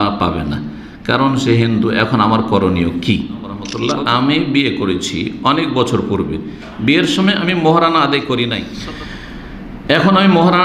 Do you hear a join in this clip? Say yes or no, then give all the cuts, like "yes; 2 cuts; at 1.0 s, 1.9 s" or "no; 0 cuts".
yes; 2 cuts; at 3.7 s, 8.7 s